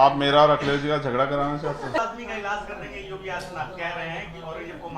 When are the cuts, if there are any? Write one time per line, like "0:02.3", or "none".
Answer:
0:02.0